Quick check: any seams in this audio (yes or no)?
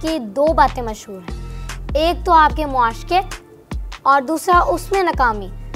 no